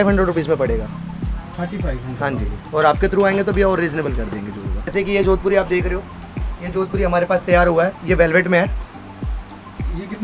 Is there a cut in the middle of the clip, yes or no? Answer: yes